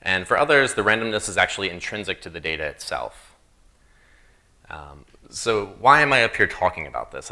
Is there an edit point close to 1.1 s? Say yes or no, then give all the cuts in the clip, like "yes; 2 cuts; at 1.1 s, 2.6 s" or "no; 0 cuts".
yes; 1 cut; at 1.1 s